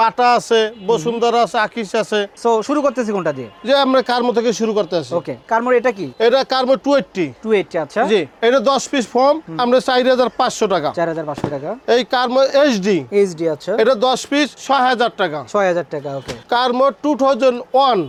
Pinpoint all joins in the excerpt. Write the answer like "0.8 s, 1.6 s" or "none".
none